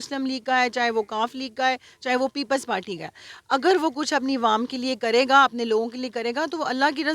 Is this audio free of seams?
yes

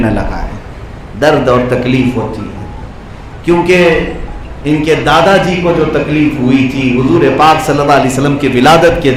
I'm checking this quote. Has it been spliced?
no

